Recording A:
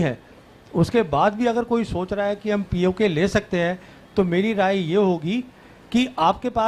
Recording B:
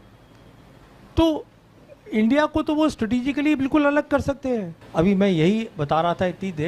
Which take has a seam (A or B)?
B